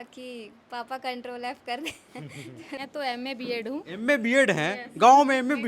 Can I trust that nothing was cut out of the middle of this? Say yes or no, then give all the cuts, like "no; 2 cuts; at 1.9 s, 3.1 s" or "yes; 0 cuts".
no; 1 cut; at 2.8 s